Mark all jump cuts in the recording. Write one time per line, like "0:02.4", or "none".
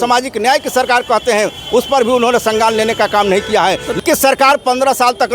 0:04.0